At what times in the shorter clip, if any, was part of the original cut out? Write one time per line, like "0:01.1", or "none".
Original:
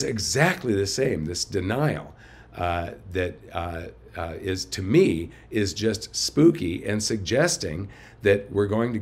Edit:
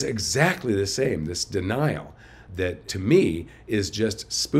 0:02.6